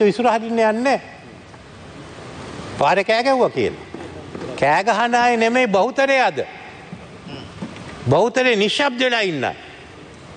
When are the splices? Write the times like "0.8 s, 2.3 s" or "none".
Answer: none

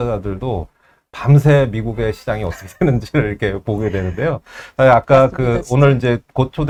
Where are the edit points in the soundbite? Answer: none

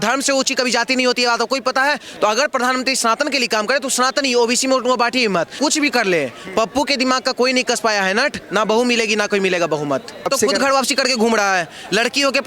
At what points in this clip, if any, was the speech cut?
5.5 s, 10.3 s

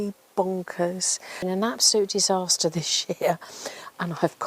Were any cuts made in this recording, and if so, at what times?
1.4 s

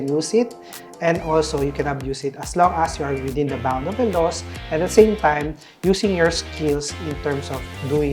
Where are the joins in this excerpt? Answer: none

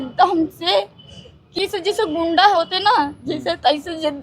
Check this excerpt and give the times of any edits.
1.5 s

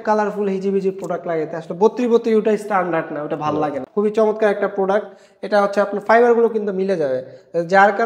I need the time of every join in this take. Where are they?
3.8 s

